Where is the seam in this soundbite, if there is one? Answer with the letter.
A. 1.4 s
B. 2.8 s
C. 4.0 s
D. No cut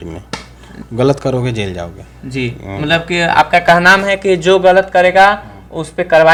D